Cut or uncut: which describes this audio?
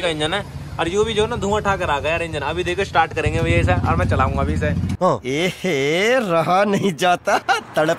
uncut